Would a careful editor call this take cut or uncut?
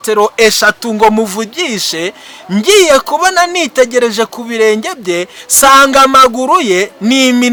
uncut